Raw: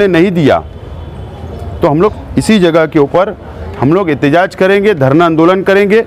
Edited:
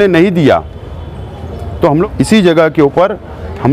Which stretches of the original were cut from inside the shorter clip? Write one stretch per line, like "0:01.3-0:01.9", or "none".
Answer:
0:02.0-0:02.2